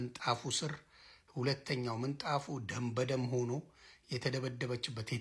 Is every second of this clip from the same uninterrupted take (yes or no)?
yes